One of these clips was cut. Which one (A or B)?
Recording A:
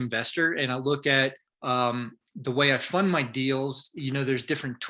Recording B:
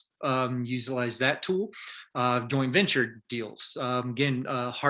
A